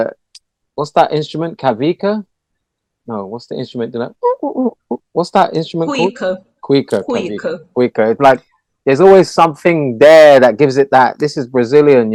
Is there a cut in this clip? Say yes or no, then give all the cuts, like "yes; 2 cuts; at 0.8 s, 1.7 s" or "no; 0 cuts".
no; 0 cuts